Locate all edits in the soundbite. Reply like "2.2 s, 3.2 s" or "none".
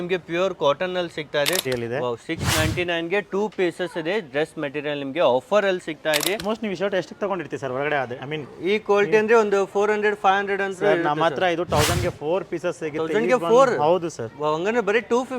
1.6 s, 6.4 s